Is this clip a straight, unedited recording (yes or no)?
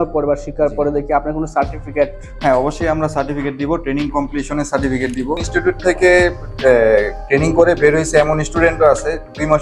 no